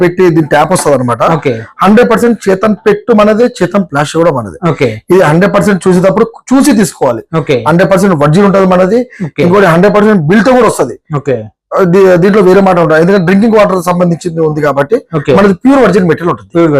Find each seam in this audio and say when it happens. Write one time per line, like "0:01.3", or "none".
none